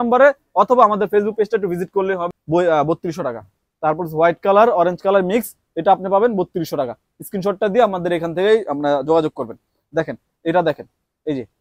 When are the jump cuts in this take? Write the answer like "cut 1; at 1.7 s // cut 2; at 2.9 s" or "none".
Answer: cut 1; at 2.2 s